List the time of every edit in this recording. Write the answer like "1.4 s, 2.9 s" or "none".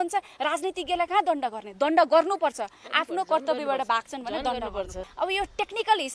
5.0 s